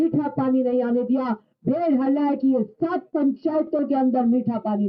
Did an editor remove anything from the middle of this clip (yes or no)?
no